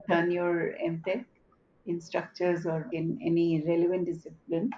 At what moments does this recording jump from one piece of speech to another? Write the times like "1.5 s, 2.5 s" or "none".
2.9 s